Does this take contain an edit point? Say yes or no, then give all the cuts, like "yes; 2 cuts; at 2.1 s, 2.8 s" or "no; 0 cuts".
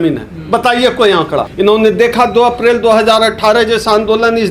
yes; 1 cut; at 1.4 s